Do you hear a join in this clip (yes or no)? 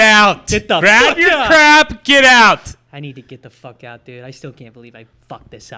no